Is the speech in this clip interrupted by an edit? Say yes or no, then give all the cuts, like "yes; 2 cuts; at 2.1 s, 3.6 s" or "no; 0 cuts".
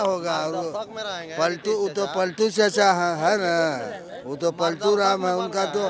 no; 0 cuts